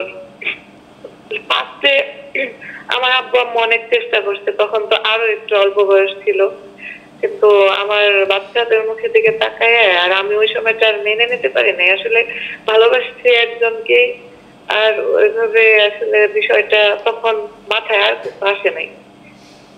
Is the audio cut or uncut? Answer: uncut